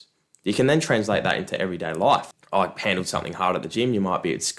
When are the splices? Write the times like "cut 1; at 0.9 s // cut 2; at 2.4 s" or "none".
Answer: cut 1; at 2.3 s